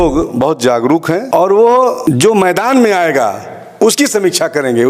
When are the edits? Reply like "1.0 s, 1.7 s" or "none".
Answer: 1.2 s, 2.0 s